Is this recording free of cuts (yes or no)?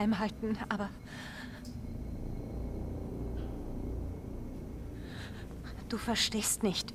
yes